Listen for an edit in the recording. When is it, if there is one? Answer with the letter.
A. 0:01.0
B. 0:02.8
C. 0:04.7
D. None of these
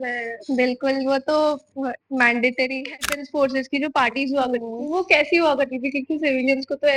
B